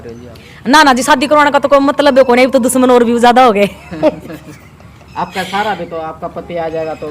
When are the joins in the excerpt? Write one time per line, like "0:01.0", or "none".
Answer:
none